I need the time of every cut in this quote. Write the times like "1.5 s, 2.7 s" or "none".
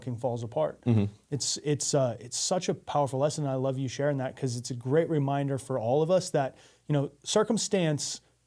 none